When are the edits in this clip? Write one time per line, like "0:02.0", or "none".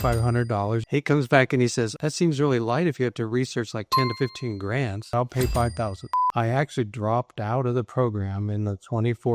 0:00.8
0:02.0
0:05.1
0:06.0